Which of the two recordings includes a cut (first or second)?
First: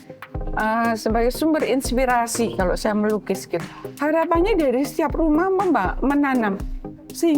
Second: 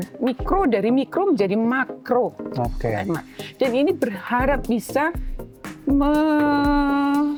first